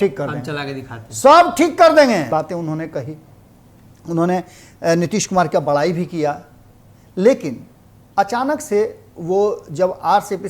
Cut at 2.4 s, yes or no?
yes